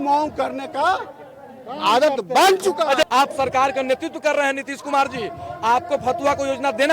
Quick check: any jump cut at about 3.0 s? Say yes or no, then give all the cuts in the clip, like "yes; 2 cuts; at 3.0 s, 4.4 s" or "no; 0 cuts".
yes; 1 cut; at 3.0 s